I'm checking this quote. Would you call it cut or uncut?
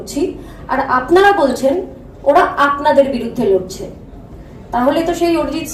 uncut